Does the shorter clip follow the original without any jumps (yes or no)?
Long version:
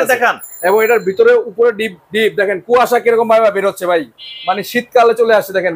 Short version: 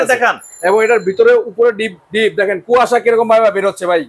yes